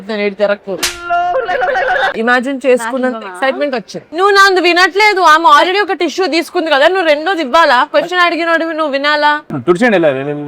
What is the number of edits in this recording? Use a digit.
3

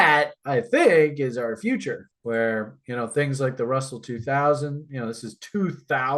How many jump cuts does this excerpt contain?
0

